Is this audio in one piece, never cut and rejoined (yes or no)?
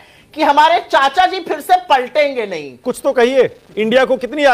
no